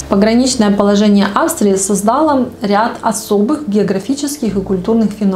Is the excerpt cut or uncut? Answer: uncut